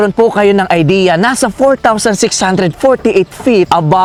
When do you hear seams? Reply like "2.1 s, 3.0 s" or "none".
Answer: none